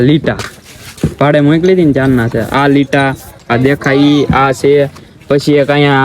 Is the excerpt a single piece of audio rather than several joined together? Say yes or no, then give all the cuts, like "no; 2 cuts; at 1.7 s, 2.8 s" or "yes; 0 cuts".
yes; 0 cuts